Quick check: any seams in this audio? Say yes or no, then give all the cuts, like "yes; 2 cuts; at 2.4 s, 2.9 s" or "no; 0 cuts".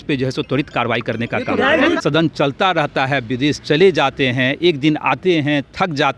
yes; 1 cut; at 2.0 s